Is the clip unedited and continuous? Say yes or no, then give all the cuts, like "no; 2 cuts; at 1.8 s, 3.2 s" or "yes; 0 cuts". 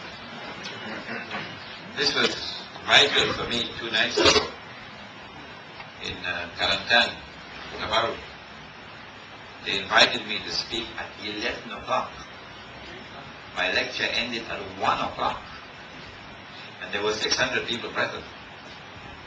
no; 1 cut; at 4.6 s